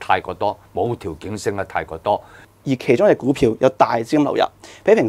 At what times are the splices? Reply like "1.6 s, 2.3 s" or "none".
2.5 s